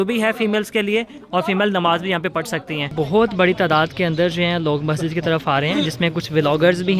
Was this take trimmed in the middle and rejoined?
yes; 1 cut; at 2.9 s

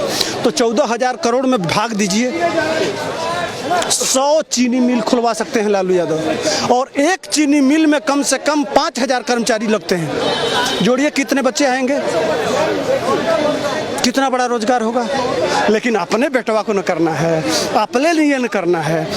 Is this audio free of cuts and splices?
yes; 0 cuts

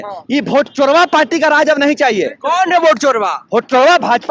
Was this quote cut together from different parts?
no; 0 cuts

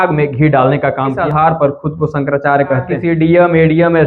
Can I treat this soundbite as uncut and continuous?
no; 2 cuts; at 1.1 s, 2.8 s

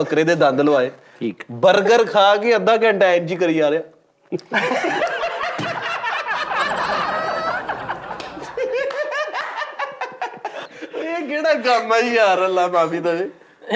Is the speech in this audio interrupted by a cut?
no; 0 cuts

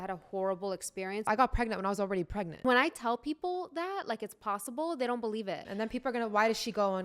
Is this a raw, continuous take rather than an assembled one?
no; 3 cuts; at 1.3 s, 2.6 s, 5.6 s

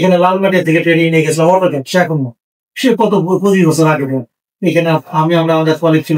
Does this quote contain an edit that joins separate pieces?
no; 0 cuts

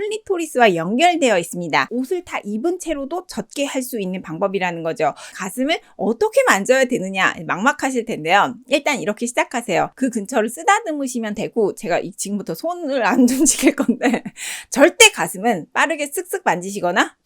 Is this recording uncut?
no; 3 cuts; at 1.9 s, 5.4 s, 9.9 s

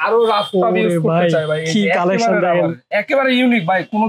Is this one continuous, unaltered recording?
yes; 0 cuts

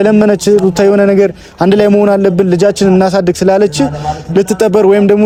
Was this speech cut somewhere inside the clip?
no; 0 cuts

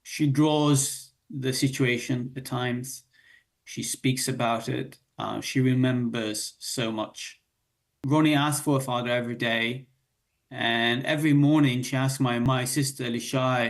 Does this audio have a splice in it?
yes; 2 cuts; at 7.9 s, 12.5 s

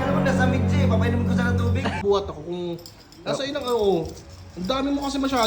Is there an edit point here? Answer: yes; 1 cut; at 2.0 s

